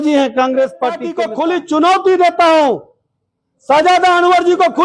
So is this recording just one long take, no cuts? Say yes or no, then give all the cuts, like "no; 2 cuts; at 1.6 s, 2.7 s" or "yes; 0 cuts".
no; 1 cut; at 1.1 s